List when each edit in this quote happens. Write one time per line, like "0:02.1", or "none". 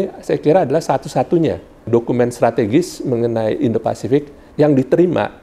0:01.9
0:04.4